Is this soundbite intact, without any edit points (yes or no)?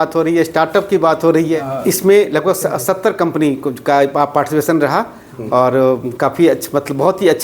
no